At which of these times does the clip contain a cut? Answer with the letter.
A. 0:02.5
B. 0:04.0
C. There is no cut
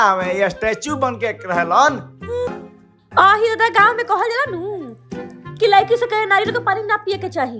A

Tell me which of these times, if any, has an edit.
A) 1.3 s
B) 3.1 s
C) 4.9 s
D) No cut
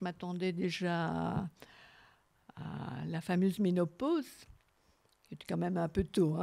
D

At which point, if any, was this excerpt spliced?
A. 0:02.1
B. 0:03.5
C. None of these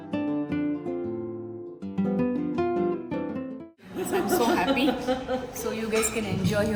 B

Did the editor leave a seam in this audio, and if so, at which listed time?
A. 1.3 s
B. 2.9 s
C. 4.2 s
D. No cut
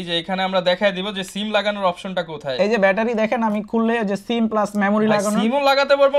D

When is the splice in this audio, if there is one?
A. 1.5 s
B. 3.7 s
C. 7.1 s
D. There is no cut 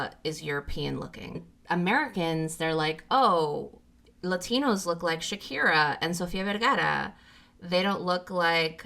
A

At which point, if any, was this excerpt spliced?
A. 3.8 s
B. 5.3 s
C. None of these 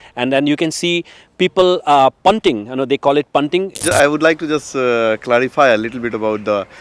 A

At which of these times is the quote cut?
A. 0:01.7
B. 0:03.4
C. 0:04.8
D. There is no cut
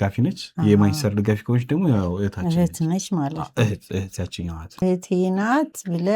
C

